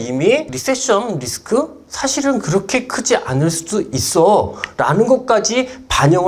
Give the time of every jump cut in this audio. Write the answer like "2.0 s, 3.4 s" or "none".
none